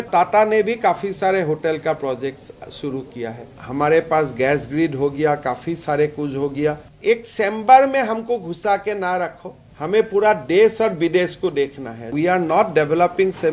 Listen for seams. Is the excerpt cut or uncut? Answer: cut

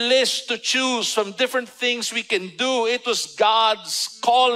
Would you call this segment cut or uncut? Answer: uncut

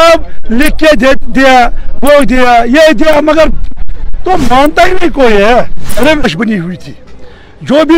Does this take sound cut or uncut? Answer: cut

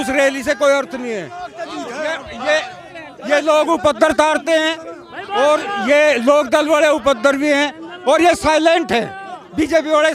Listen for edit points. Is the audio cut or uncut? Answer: uncut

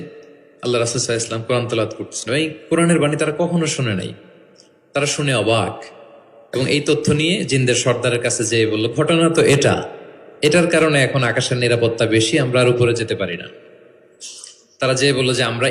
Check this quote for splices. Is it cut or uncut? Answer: uncut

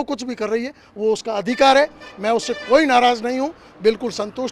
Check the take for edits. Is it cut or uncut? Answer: uncut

